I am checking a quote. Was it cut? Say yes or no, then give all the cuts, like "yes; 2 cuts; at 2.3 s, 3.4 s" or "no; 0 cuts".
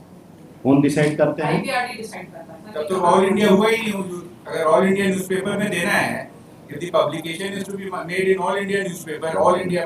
no; 0 cuts